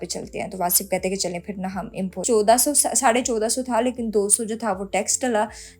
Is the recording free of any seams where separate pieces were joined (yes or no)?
no